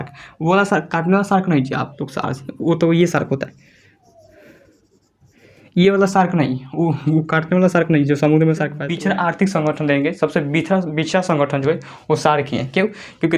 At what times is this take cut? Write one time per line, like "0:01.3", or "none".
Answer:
0:08.8

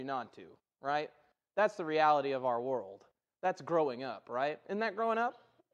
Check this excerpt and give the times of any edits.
none

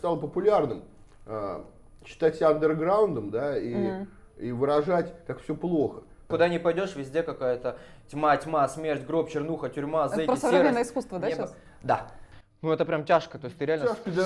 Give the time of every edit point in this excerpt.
0:06.3
0:12.2

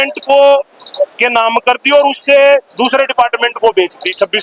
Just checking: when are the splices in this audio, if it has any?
none

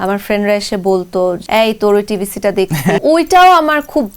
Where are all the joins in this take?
0:01.4
0:03.0

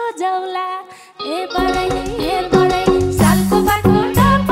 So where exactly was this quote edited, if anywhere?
none

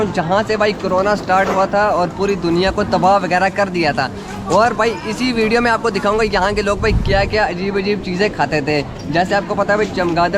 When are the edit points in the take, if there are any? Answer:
none

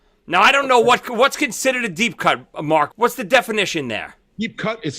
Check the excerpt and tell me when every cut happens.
0:02.9

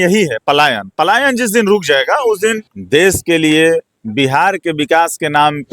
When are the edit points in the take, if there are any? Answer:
0:02.7

